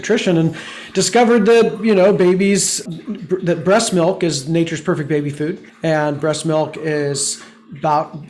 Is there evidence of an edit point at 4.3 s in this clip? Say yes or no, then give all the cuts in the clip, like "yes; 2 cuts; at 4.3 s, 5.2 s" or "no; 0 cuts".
no; 2 cuts; at 2.8 s, 5.7 s